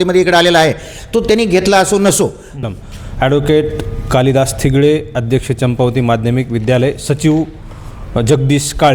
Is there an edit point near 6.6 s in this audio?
no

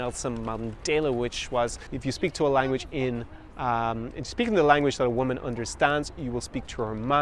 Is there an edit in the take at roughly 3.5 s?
no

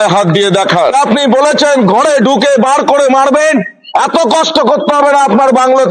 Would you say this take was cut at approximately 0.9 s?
yes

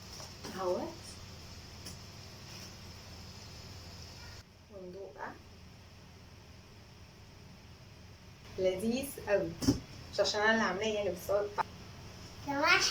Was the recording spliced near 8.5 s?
yes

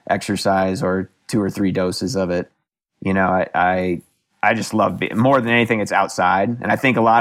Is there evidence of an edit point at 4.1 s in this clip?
no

